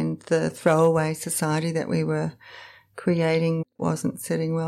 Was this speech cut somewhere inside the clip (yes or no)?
yes